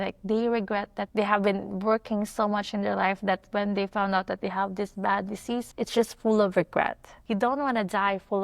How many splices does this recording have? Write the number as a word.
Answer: three